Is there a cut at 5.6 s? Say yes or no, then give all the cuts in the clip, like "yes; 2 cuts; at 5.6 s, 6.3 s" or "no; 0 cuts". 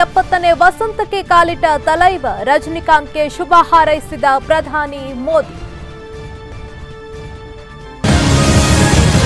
no; 1 cut; at 8.0 s